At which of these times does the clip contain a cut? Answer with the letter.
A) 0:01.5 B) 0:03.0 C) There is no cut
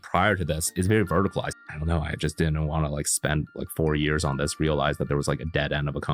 A